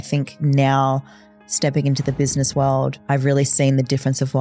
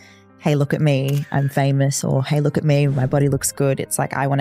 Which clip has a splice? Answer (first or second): first